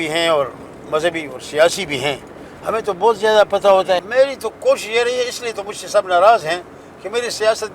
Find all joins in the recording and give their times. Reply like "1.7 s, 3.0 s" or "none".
4.1 s